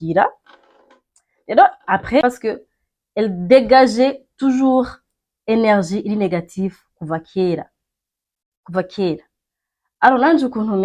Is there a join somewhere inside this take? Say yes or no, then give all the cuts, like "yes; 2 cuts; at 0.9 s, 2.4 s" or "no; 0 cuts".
yes; 1 cut; at 2.2 s